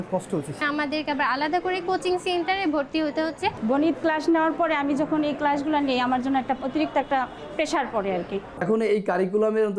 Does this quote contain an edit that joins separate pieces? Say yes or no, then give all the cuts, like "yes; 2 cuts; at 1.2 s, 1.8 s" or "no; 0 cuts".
yes; 3 cuts; at 3.6 s, 6.6 s, 8.6 s